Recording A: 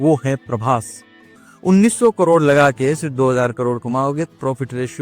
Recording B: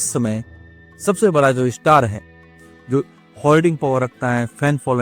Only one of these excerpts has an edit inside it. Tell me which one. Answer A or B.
A